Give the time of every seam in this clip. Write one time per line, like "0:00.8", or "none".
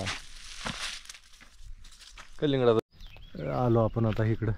0:02.8